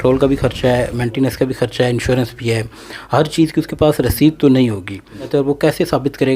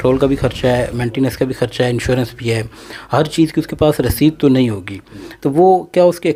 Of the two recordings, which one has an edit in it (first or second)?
first